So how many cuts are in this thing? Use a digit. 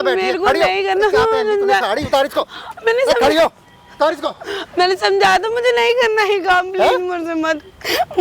0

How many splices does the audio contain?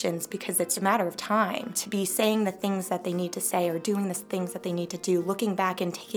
2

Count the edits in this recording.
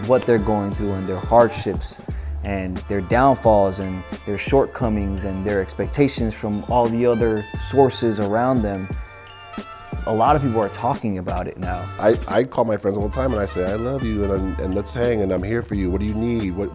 1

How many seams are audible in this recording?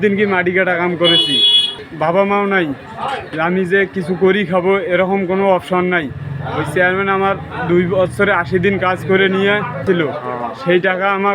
2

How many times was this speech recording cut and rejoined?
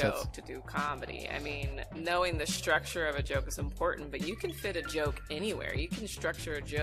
1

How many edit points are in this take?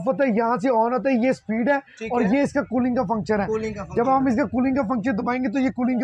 0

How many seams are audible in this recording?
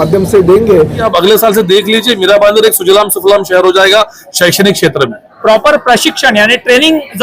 2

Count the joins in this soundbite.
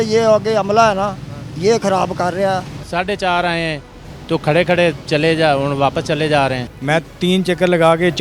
2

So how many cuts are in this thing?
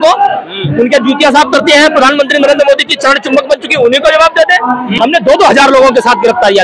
1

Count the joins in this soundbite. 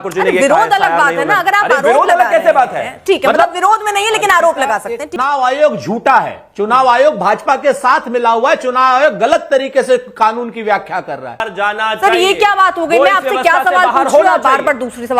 2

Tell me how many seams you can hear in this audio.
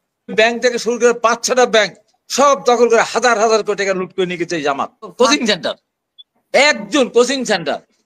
1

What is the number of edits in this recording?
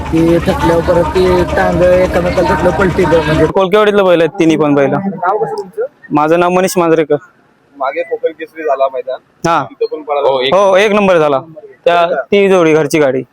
2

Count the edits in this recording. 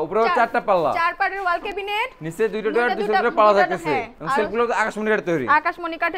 0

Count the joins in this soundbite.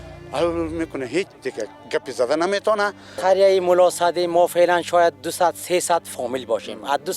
1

